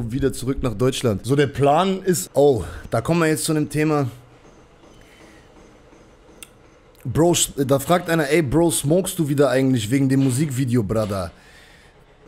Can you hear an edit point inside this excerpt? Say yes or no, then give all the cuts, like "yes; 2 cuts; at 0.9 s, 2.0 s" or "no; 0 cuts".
yes; 2 cuts; at 1.2 s, 2.2 s